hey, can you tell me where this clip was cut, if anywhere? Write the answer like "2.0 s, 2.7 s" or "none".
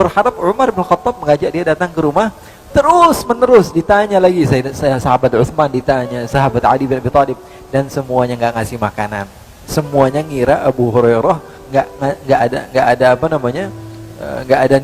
none